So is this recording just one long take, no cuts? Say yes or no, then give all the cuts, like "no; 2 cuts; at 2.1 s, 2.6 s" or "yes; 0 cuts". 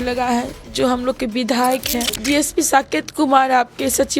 no; 1 cut; at 2.1 s